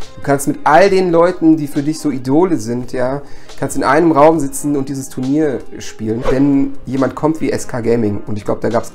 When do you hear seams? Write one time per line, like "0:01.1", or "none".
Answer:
0:06.2
0:06.8